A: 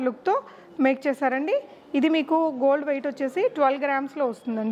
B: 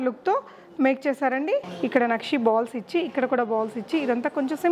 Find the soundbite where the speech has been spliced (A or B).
B